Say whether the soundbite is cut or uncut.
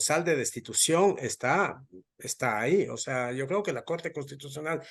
uncut